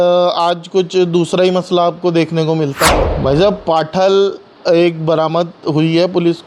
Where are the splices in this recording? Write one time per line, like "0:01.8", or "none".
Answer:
0:03.0

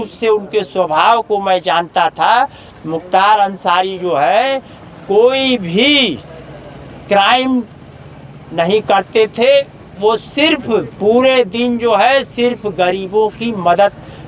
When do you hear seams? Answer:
none

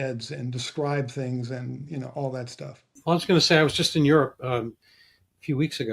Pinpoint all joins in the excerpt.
0:02.8

